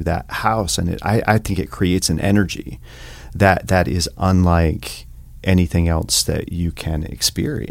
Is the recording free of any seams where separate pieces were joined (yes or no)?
yes